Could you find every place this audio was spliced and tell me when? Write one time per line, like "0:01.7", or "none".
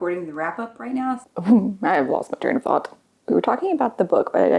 0:01.3